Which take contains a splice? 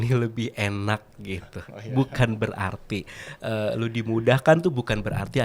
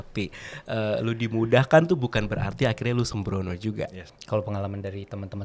second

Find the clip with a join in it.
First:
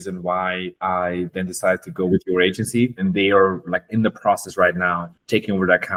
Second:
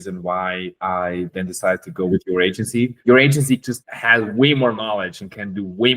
second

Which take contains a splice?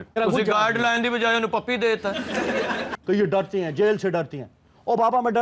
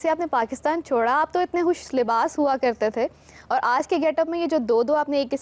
first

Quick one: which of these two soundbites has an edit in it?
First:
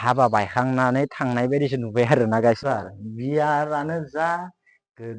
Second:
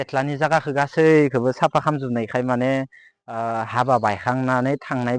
first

